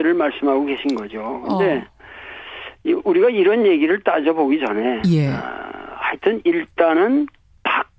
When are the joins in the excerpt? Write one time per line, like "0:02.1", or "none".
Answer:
0:02.4